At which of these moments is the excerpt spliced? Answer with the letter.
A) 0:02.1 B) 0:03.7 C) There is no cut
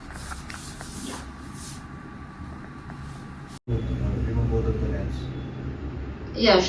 B